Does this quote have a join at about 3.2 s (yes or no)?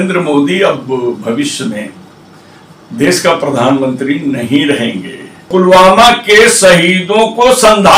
no